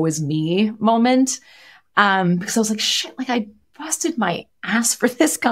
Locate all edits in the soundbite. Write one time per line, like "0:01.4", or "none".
none

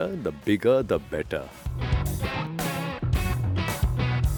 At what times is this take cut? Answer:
none

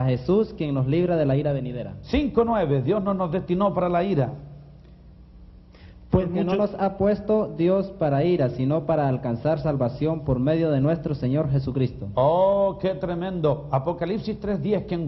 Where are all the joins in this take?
0:01.7

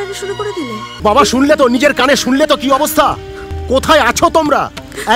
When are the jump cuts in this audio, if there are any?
0:00.9

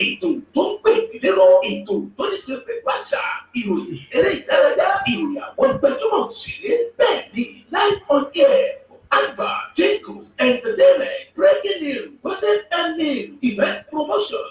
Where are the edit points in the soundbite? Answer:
none

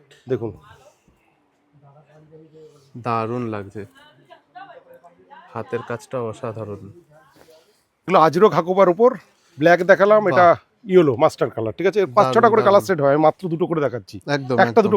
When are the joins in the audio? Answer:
0:08.0

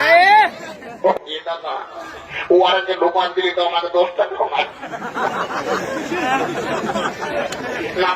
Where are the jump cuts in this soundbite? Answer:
0:01.1

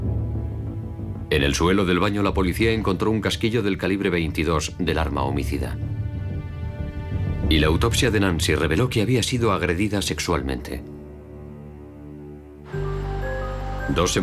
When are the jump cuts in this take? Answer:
none

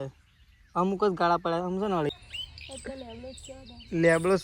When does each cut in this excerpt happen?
0:02.1

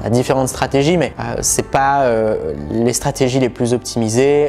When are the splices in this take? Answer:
none

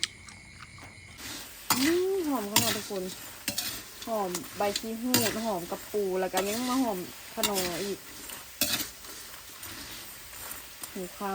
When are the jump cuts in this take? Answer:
0:01.0

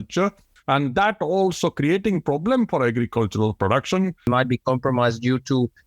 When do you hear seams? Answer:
0:04.3

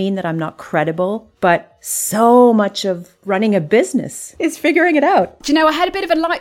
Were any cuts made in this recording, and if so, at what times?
0:01.3
0:03.1
0:04.2
0:05.4

